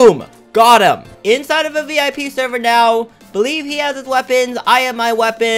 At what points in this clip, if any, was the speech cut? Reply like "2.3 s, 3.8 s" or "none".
1.1 s